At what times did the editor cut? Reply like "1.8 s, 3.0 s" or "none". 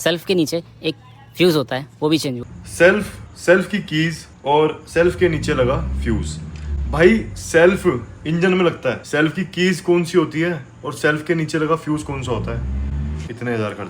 none